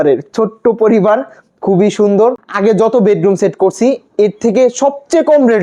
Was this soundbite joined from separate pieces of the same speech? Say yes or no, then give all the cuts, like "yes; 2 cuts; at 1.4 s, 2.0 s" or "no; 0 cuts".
yes; 1 cut; at 2.5 s